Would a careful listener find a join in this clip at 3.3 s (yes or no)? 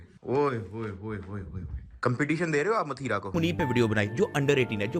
yes